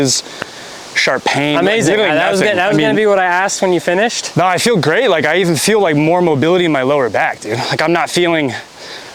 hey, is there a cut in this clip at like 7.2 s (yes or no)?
no